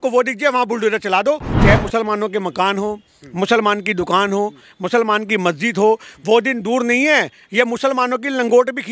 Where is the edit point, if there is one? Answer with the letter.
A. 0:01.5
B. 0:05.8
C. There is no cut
A